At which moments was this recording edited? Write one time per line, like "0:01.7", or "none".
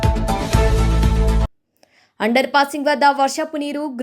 0:01.5

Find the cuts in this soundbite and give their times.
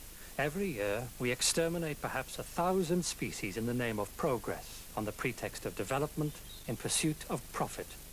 0:06.0

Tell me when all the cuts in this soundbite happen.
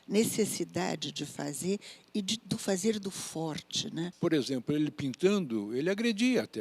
0:04.1

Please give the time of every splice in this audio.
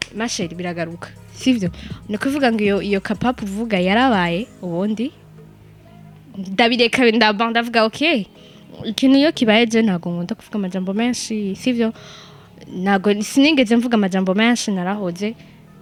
none

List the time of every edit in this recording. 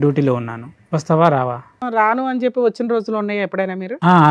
0:01.8

